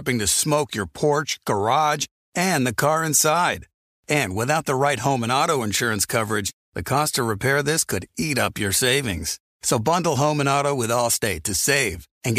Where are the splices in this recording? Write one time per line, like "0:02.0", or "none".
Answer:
none